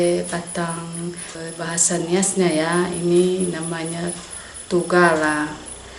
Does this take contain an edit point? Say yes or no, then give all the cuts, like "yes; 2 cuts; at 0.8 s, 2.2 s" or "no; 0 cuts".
yes; 1 cut; at 1.3 s